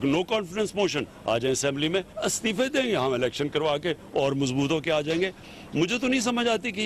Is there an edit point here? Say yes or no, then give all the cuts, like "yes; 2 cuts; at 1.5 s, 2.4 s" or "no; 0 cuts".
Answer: yes; 1 cut; at 2.1 s